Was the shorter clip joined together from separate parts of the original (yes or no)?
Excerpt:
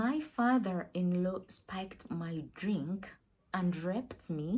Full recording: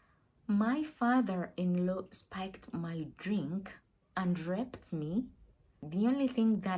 no